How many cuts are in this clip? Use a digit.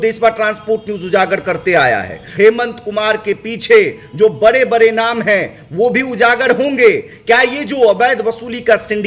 1